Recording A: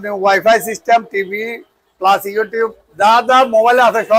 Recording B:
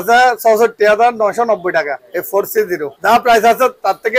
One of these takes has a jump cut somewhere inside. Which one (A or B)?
B